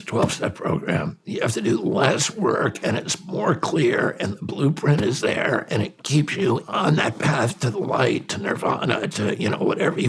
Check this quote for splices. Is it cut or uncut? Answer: cut